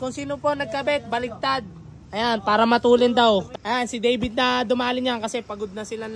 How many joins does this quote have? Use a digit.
1